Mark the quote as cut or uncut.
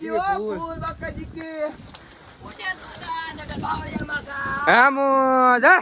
uncut